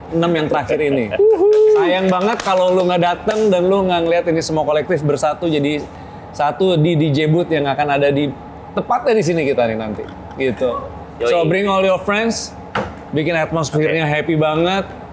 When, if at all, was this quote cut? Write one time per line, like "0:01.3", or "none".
none

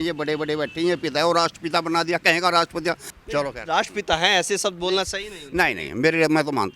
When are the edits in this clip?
0:03.1

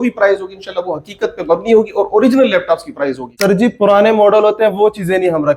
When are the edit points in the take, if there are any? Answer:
0:03.3

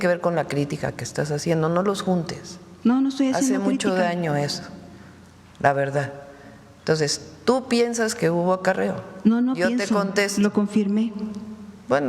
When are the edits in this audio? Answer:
none

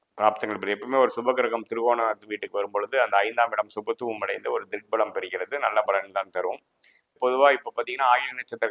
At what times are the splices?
0:07.2

